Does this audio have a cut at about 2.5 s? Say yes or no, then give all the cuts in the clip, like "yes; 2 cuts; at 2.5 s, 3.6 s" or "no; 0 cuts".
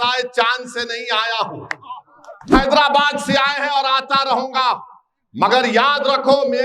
yes; 1 cut; at 2.5 s